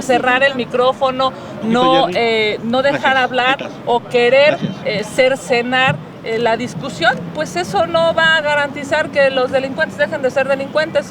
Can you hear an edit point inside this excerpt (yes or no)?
no